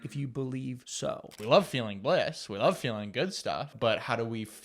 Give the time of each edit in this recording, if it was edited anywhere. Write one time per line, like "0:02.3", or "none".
0:01.0
0:03.7